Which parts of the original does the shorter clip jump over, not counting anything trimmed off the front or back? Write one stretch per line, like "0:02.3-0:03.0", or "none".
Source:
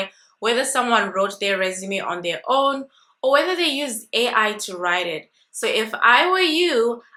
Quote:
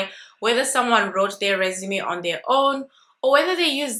none